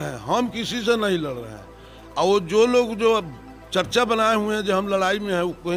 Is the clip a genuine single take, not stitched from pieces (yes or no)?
yes